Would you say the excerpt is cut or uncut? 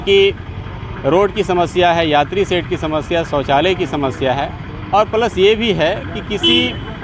uncut